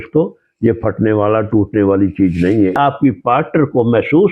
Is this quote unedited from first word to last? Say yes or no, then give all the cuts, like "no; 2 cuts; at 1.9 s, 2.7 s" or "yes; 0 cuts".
no; 1 cut; at 2.7 s